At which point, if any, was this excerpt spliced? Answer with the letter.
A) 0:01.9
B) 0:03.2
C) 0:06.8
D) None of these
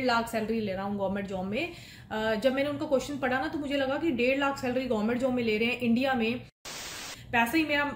C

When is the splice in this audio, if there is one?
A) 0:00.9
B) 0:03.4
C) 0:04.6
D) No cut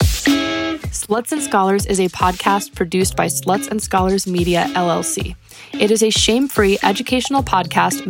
A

